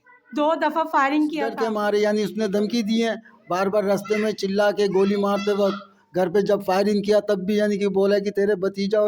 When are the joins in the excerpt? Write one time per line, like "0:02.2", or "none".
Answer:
0:01.6